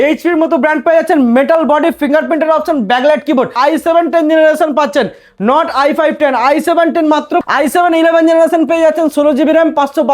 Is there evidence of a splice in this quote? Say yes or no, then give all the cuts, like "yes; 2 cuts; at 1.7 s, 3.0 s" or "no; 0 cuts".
yes; 2 cuts; at 3.5 s, 7.4 s